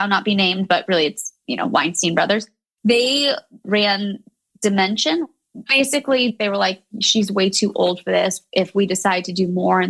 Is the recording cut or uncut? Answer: cut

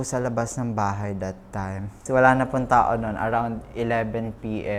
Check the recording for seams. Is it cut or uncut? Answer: cut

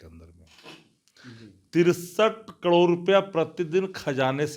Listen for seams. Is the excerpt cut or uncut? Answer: uncut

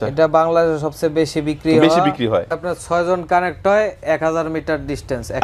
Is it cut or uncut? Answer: cut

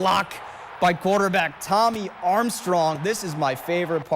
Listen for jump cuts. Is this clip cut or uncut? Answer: cut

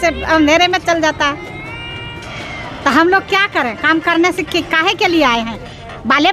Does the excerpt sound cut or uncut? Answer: uncut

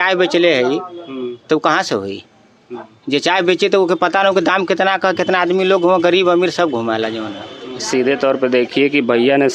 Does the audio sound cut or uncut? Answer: cut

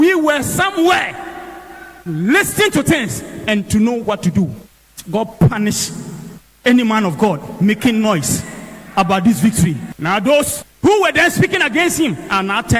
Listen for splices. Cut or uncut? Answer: cut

